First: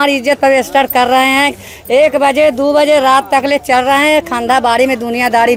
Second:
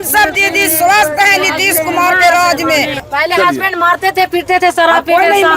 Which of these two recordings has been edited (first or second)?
second